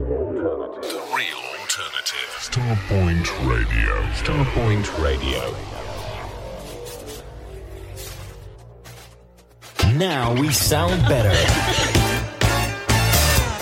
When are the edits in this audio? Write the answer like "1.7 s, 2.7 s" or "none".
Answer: none